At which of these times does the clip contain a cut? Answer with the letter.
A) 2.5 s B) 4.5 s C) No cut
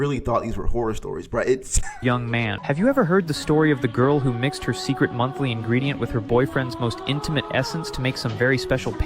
A